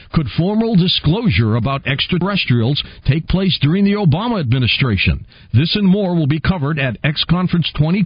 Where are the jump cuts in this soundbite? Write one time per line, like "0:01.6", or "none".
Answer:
0:02.2